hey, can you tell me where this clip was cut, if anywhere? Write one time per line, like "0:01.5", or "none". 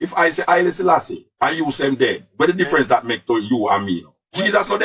none